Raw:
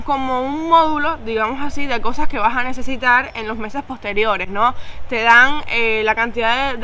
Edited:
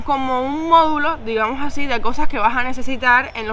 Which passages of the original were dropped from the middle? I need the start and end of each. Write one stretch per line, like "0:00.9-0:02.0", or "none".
none